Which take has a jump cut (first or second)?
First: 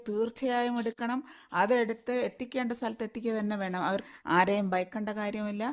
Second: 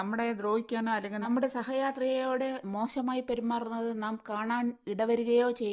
first